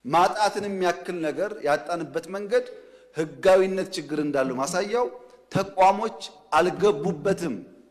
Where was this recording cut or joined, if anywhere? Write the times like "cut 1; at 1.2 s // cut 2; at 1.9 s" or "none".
none